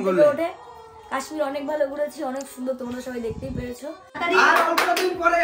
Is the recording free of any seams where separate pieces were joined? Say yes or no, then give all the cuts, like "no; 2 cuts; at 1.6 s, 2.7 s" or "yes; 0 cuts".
no; 1 cut; at 4.1 s